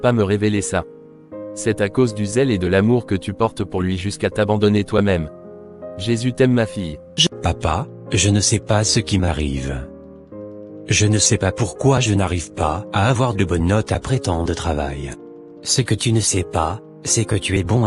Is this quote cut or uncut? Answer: cut